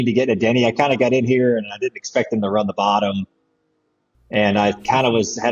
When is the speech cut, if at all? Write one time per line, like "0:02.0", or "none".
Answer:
none